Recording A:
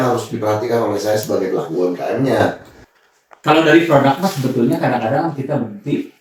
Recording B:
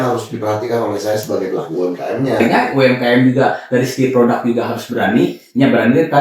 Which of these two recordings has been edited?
B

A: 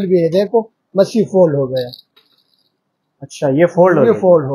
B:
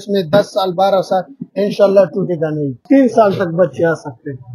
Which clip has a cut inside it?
B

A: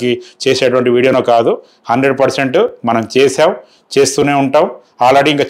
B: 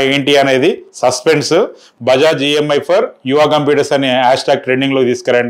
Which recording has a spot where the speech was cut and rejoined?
B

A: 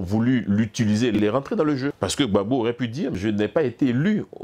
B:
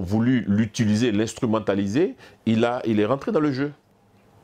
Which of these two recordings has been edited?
A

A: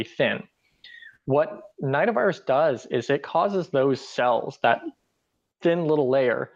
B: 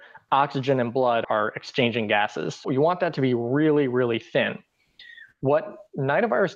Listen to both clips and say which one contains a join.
B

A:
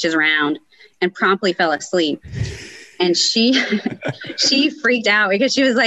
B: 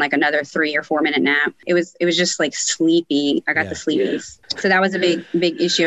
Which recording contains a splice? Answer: B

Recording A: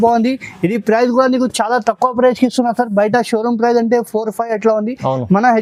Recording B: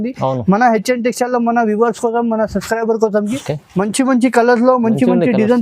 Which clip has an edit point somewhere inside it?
B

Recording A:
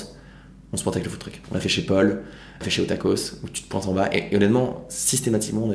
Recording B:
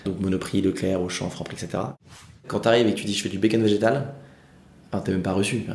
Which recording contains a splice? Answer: B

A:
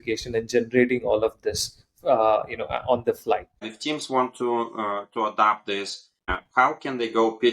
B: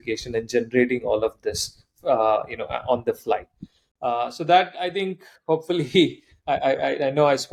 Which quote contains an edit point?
A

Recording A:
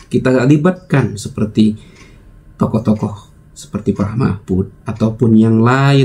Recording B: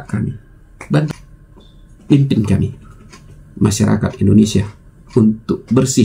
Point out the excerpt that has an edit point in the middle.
B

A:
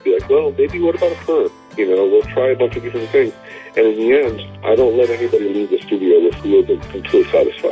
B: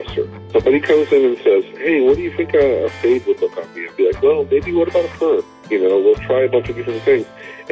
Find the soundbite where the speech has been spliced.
A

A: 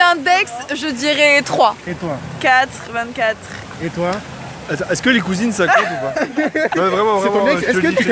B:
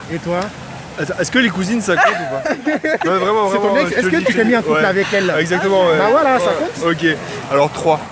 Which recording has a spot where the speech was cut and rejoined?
A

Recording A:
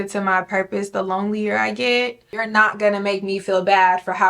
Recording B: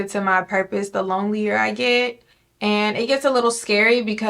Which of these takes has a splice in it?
A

